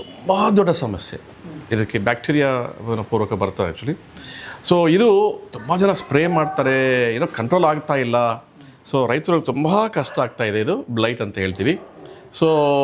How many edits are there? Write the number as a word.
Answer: zero